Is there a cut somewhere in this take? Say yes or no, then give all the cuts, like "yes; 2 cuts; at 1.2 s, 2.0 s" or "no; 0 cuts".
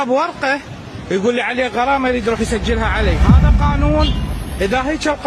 no; 0 cuts